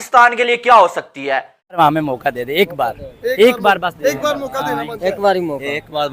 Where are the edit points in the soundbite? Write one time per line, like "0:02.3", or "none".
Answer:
0:01.8